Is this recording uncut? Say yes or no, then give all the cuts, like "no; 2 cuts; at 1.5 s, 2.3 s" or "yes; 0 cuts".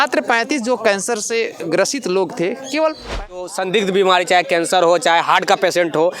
no; 1 cut; at 3.5 s